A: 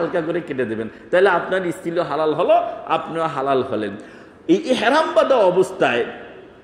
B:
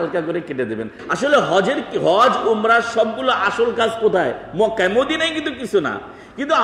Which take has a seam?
B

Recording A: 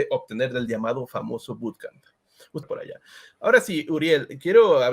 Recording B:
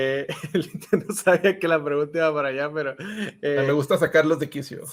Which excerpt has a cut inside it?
A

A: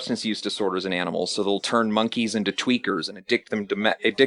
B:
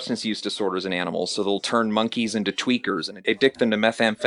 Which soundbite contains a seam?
B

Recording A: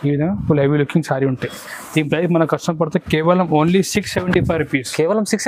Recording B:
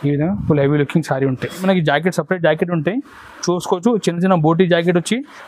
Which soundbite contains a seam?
B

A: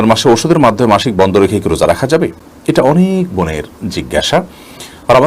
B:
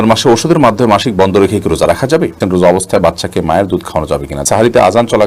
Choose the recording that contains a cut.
B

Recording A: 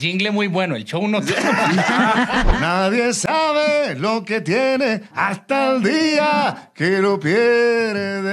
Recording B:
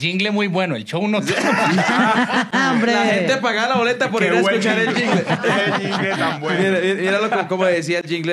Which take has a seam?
A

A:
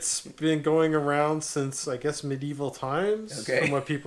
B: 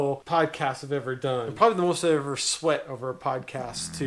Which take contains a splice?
B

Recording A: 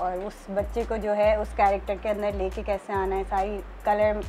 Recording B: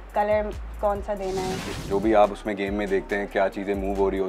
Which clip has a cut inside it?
B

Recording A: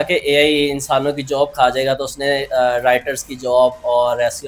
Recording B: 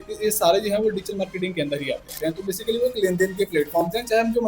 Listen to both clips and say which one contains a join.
B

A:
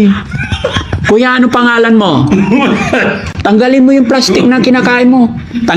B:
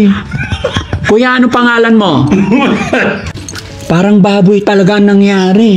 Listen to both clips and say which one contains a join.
B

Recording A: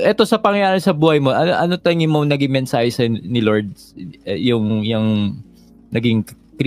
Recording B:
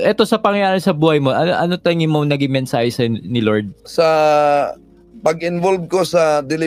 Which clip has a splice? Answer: B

